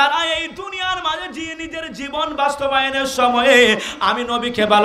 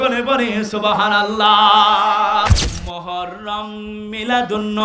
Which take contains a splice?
second; 1 cut; at 2.5 s

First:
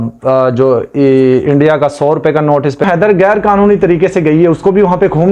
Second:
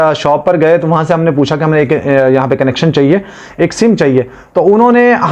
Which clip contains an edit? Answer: first; 1 cut; at 2.8 s

